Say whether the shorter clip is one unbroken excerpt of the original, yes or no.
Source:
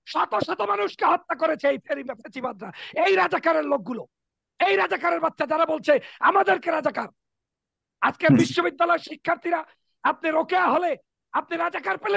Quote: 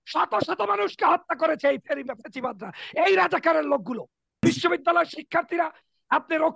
no